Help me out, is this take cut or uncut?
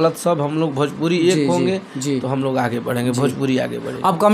uncut